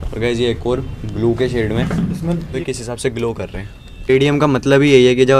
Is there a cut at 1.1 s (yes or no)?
no